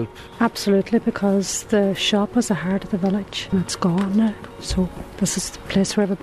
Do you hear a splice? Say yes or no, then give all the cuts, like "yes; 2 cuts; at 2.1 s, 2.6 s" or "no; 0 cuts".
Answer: yes; 1 cut; at 3.4 s